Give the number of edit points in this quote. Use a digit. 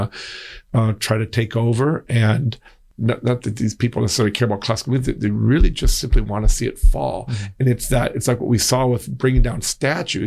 1